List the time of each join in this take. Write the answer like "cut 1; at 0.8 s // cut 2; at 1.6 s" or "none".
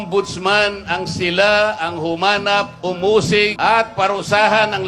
cut 1; at 3.6 s